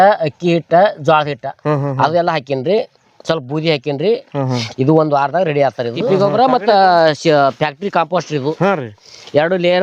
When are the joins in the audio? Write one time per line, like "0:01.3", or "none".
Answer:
0:06.0

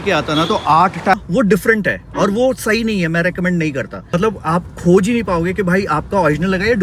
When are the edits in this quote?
0:01.1
0:04.1

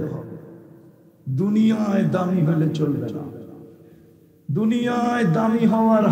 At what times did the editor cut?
none

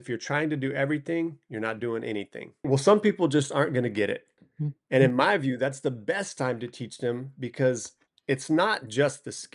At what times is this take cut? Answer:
0:02.7

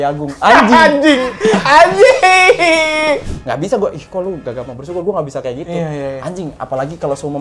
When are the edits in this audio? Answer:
0:03.3

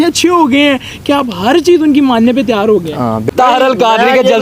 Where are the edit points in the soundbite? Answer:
0:03.2

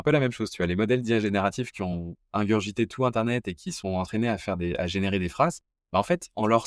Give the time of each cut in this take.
0:05.7

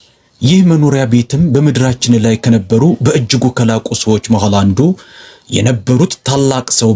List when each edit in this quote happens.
none

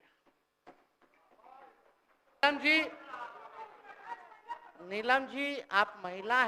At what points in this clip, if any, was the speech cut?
0:02.4

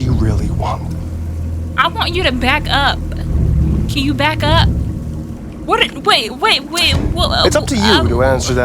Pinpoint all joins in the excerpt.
0:05.4

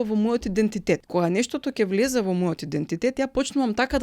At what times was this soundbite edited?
0:01.1

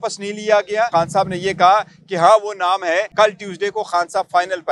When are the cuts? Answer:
0:00.9
0:03.1

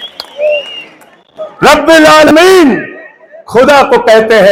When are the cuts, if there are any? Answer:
none

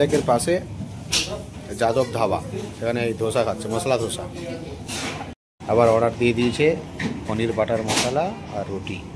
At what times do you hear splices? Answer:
none

